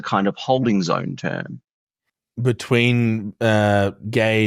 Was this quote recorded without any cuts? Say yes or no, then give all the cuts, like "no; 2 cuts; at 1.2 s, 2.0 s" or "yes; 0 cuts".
yes; 0 cuts